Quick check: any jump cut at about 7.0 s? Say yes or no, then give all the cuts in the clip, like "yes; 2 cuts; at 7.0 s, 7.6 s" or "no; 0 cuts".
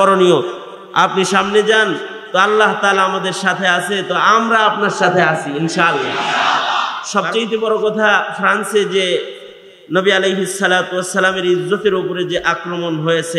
yes; 1 cut; at 7.0 s